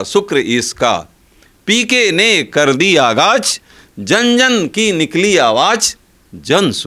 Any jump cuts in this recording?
no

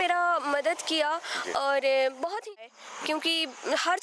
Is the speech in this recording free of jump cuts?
no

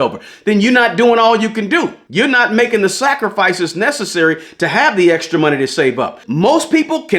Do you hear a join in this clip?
yes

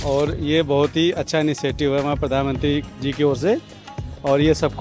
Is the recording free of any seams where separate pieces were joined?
yes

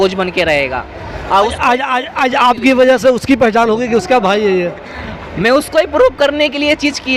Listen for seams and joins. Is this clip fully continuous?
yes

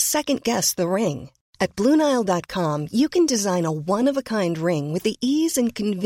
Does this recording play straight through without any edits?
yes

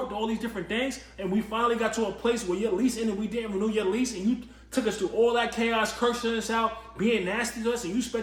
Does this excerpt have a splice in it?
no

